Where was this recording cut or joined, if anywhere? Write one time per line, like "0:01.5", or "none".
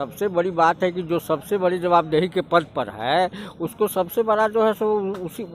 none